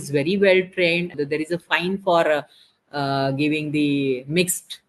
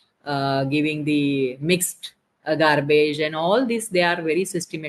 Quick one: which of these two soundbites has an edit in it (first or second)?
first